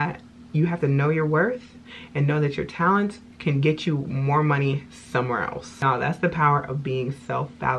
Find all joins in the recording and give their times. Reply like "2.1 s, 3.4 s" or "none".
5.8 s